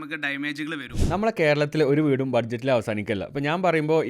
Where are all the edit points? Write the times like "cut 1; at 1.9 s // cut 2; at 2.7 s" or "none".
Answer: cut 1; at 1.0 s